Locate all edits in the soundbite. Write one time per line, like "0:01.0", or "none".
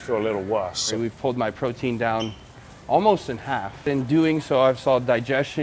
0:00.9
0:03.9